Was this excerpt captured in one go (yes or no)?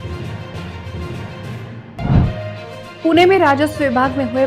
no